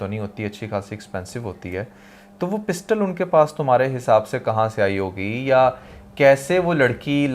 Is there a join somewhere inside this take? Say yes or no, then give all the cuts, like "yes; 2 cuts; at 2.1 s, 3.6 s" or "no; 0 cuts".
no; 0 cuts